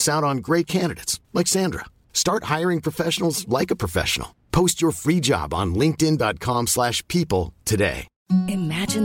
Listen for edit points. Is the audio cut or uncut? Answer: cut